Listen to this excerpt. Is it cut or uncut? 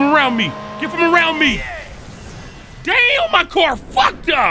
uncut